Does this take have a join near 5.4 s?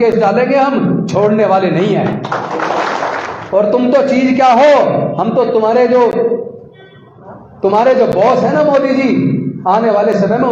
no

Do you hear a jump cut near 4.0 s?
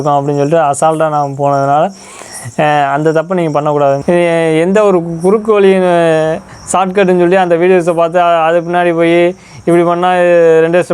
yes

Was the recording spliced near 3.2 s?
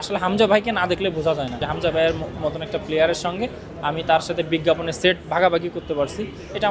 no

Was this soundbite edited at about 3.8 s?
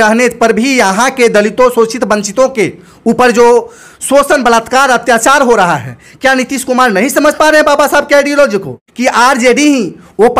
no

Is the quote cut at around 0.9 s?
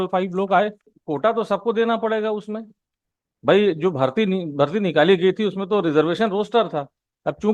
yes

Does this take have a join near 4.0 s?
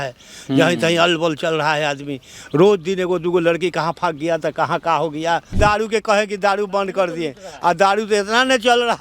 no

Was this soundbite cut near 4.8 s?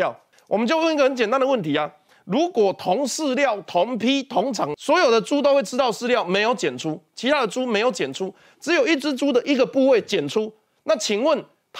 yes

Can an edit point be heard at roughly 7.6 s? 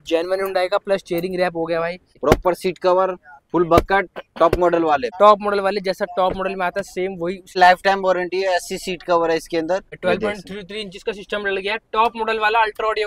yes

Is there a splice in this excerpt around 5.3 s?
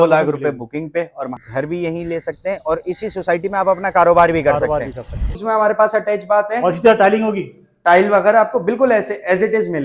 yes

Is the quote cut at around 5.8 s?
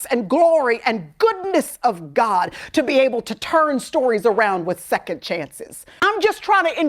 yes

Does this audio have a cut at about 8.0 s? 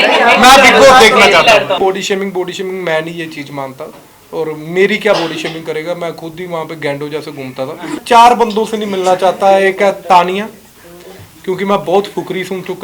yes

